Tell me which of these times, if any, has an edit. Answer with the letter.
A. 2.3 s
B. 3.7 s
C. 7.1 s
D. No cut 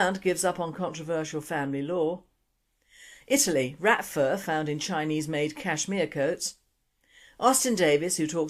B